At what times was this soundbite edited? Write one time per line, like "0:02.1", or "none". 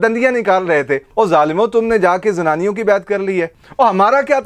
0:01.1
0:03.5